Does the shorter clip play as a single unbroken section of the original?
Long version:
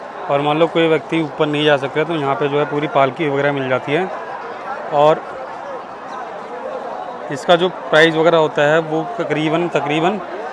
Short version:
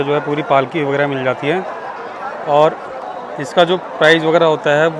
no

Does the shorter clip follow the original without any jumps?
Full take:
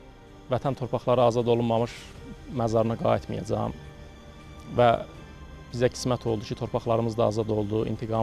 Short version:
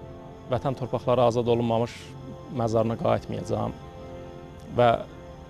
yes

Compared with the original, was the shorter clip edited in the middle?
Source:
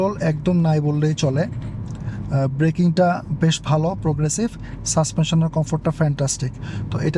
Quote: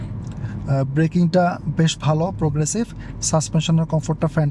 no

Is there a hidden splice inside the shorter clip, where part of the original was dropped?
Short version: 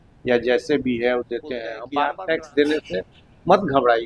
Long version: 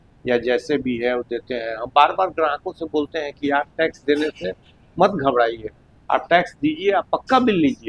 yes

